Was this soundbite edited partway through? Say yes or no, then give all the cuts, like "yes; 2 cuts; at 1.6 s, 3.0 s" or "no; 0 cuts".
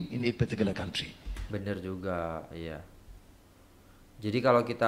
no; 0 cuts